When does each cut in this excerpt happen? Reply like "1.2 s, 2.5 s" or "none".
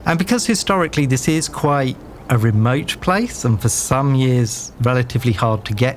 4.6 s

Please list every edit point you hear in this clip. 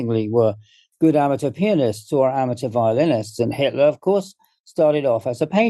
none

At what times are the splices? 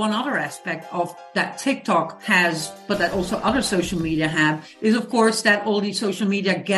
none

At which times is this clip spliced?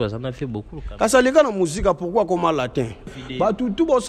3.1 s

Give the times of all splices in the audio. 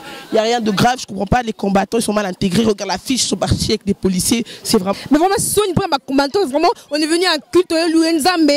4.9 s

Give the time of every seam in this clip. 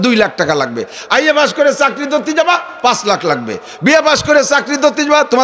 none

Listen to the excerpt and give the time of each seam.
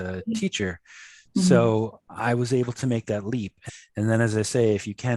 3.6 s

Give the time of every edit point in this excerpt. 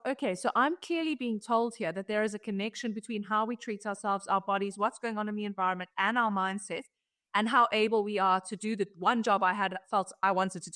none

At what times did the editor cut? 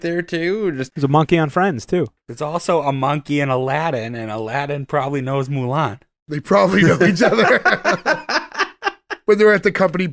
0.8 s, 2.2 s

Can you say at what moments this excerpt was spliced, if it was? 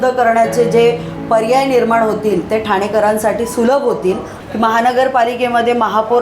4.3 s

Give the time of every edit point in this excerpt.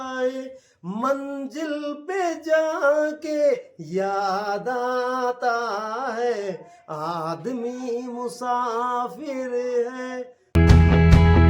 10.5 s

